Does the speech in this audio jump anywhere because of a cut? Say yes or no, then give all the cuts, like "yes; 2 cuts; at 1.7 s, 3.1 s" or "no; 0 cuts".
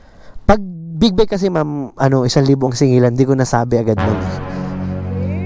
yes; 1 cut; at 4.1 s